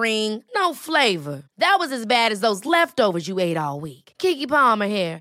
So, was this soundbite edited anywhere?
no; 0 cuts

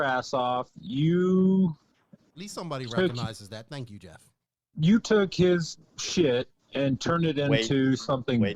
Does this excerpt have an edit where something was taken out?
no; 0 cuts

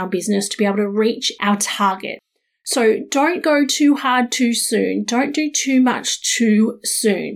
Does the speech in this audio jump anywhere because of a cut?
yes; 2 cuts; at 1.3 s, 2.2 s

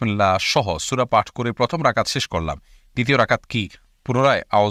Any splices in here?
no; 0 cuts

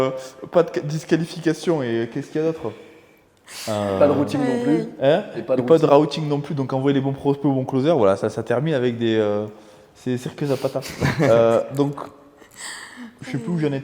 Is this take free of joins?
yes; 0 cuts

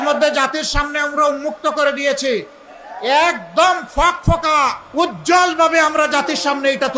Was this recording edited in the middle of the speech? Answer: yes; 1 cut; at 4.8 s

